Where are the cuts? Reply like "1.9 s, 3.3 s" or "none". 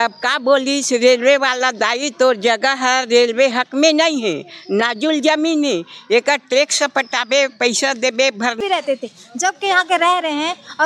8.6 s